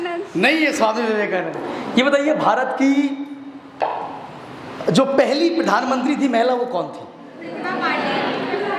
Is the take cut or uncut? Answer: cut